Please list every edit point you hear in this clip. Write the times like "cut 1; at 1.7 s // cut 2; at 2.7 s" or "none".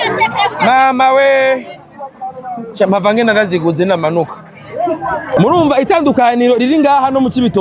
cut 1; at 5.4 s